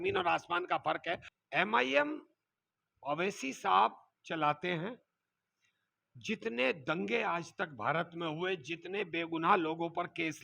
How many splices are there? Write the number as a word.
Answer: one